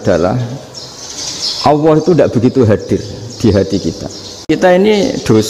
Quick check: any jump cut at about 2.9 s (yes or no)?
no